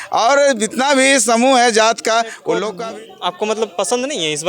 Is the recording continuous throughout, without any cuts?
no; 1 cut; at 2.7 s

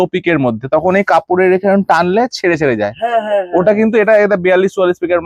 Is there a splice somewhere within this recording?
no; 0 cuts

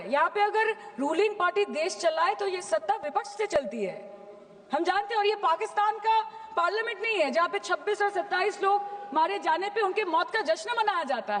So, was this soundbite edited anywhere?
no; 0 cuts

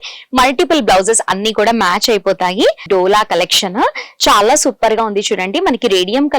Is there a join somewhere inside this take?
yes; 1 cut; at 2.8 s

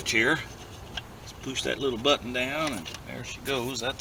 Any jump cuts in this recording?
no; 0 cuts

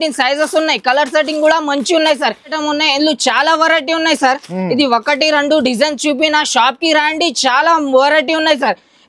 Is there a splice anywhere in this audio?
yes; 1 cut; at 2.6 s

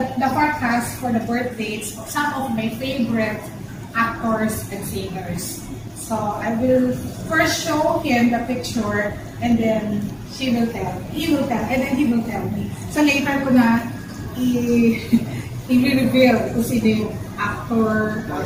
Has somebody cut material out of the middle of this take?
no; 0 cuts

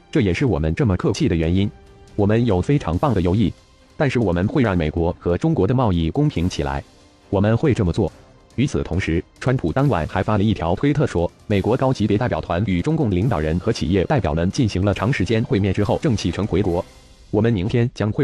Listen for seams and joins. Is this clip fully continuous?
no; 1 cut; at 10.6 s

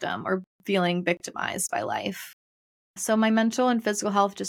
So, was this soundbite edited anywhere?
yes; 1 cut; at 3.0 s

